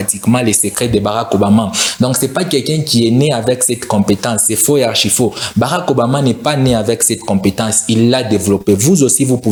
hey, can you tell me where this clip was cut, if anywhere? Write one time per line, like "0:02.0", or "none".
none